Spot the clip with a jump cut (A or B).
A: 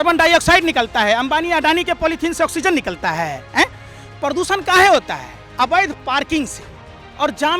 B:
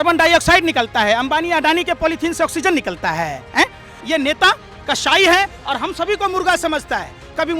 B